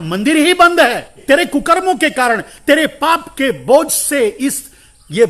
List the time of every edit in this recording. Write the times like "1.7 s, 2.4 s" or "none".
1.2 s